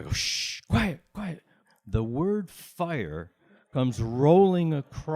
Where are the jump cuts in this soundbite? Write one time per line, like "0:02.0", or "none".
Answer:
0:01.6